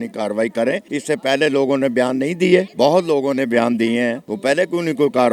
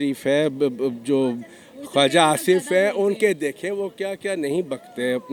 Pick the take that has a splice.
first; 3 cuts; at 0.8 s, 2.7 s, 4.3 s

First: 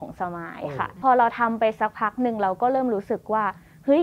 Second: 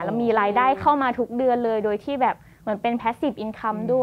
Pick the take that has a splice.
first; 1 cut; at 1.0 s

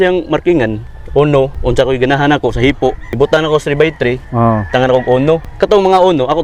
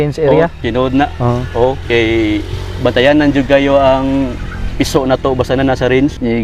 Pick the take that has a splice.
first; 3 cuts; at 1.6 s, 3.0 s, 5.5 s

